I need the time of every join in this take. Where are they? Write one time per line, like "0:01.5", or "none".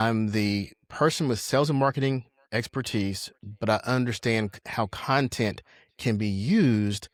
none